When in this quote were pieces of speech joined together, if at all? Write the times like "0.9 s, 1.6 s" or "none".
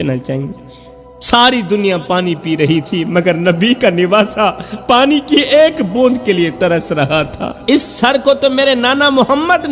7.5 s